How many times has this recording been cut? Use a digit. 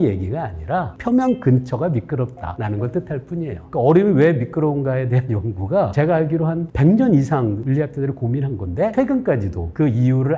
6